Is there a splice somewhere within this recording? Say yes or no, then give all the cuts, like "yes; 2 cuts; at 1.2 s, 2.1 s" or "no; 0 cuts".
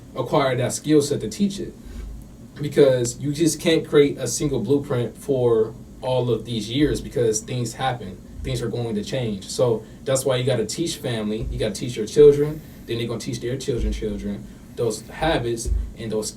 no; 0 cuts